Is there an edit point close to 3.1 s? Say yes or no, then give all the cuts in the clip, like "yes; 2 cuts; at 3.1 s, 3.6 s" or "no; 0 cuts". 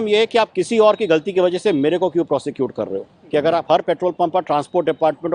yes; 1 cut; at 3.1 s